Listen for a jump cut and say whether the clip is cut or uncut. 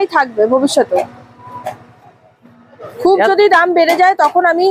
uncut